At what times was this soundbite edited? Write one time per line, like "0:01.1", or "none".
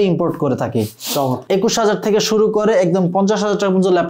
0:01.4